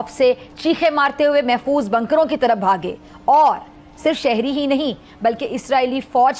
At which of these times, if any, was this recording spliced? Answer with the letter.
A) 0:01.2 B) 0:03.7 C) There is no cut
C